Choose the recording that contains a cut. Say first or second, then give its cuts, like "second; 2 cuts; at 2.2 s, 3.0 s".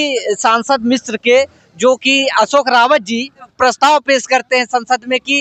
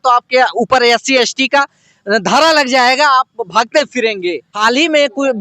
second; 1 cut; at 4.5 s